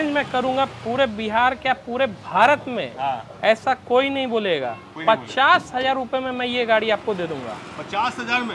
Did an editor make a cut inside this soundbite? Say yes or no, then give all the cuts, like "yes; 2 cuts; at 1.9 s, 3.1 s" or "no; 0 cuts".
no; 0 cuts